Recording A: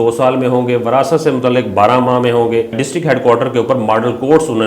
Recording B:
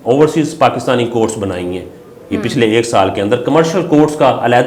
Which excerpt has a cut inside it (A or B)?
A